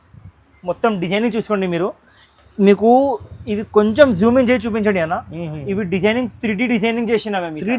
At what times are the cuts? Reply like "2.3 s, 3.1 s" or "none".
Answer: none

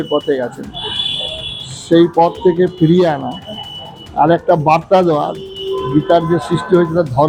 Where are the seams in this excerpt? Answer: none

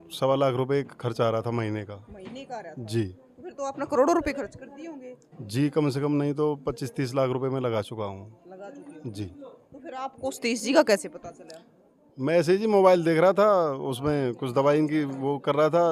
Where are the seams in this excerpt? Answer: none

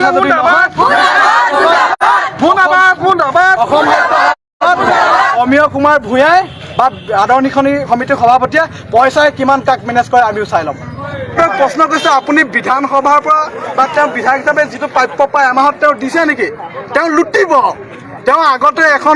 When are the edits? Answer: 11.4 s

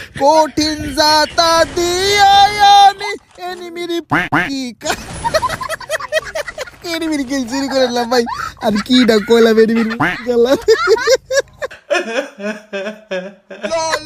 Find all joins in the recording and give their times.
none

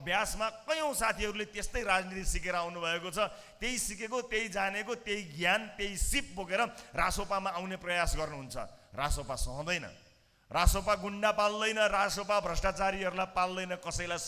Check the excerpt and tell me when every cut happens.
none

